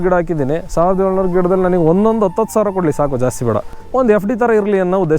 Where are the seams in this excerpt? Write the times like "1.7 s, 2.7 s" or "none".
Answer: 3.8 s